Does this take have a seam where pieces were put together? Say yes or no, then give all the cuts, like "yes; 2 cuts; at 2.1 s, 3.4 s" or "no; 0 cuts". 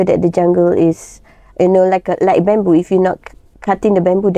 no; 0 cuts